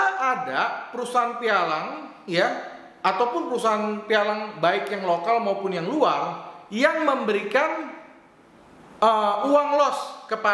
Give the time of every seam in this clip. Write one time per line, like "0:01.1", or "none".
none